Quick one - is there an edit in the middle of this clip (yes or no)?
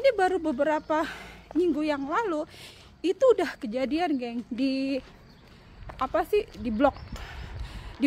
no